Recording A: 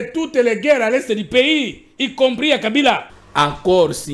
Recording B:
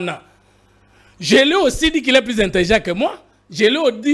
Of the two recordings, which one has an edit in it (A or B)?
A